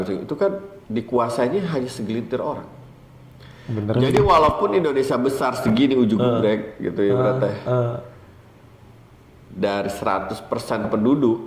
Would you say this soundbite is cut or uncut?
uncut